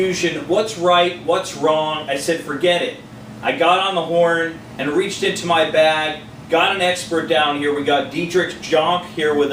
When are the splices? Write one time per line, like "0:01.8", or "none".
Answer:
0:08.5